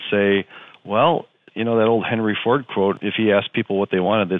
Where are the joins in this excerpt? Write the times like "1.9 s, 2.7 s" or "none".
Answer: 1.4 s, 3.0 s